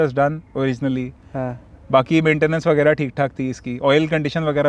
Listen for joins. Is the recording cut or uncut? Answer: uncut